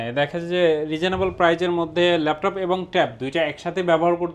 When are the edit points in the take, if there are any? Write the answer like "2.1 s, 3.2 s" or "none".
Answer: none